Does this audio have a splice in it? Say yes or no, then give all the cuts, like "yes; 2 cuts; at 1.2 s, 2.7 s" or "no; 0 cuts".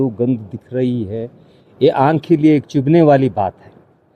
no; 0 cuts